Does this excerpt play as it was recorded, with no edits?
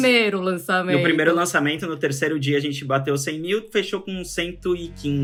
yes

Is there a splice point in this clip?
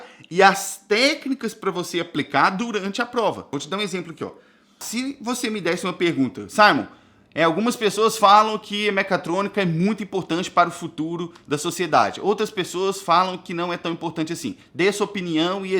yes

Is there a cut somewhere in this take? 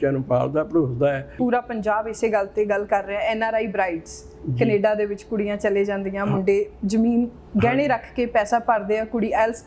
yes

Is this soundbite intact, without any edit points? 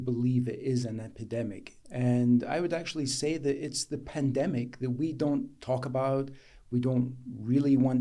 yes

